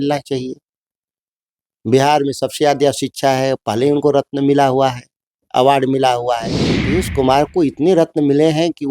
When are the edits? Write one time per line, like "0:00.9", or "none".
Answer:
0:06.8